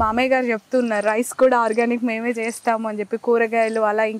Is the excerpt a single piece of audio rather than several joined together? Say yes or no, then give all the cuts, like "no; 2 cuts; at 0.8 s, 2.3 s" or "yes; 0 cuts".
yes; 0 cuts